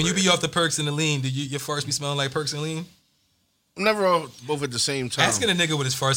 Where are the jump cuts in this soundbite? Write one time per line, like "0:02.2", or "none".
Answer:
none